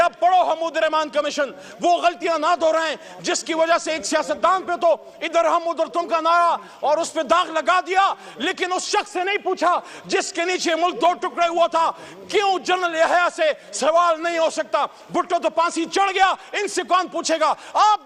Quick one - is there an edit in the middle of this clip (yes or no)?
no